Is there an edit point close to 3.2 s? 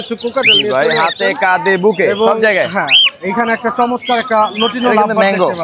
no; 0 cuts

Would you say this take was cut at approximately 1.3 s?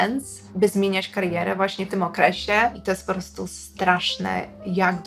no; 1 cut; at 2.8 s

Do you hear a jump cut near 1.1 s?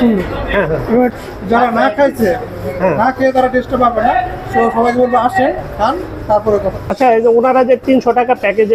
yes; 2 cuts; at 1.1 s, 6.9 s

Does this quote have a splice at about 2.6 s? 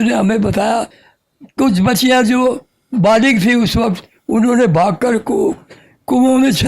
no; 1 cut; at 1.2 s

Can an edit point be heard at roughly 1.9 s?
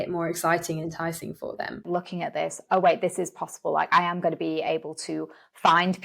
yes; 1 cut; at 1.9 s

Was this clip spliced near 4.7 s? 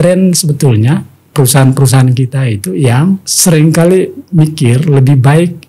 no; 2 cuts; at 1.2 s, 3.3 s

